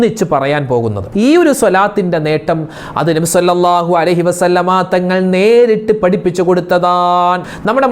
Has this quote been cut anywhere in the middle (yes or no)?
yes